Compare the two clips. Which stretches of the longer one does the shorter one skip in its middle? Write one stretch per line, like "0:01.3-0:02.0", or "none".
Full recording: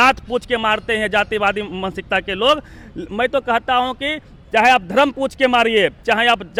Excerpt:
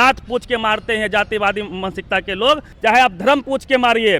0:02.7-0:04.4